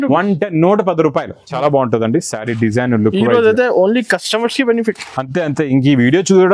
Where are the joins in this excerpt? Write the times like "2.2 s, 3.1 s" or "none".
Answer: 1.4 s